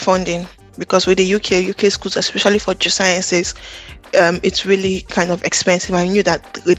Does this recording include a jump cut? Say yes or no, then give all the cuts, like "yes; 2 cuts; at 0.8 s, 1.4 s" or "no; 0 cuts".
no; 0 cuts